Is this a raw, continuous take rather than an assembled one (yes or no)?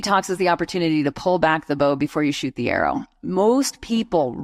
yes